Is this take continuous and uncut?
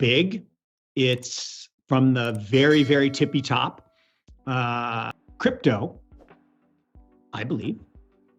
yes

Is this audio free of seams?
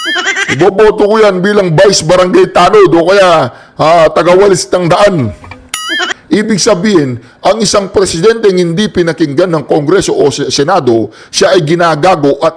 no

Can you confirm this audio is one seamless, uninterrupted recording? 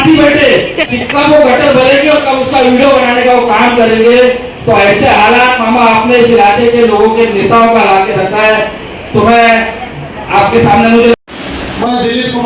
no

